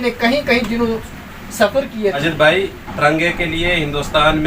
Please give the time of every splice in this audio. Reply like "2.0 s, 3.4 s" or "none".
2.2 s